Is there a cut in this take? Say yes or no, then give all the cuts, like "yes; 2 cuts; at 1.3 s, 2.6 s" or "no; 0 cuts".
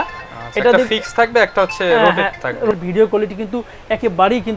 yes; 1 cut; at 2.7 s